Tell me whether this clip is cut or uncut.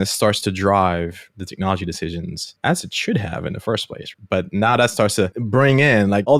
cut